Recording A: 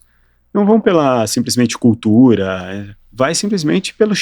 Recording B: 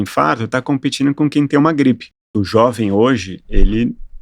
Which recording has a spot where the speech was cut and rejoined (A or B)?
B